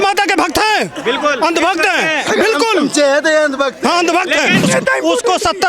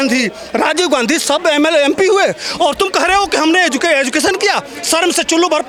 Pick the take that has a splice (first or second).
first